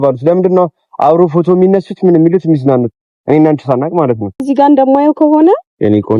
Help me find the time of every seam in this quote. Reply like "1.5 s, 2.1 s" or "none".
4.4 s